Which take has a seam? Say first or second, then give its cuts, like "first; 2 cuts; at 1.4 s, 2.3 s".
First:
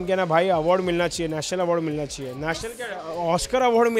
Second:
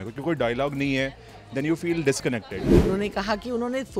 second; 1 cut; at 2.7 s